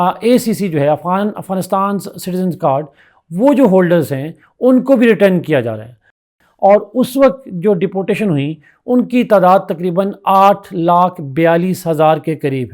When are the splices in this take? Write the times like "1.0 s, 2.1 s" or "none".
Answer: 6.2 s